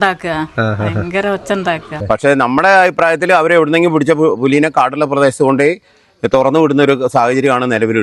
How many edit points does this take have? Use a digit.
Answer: 1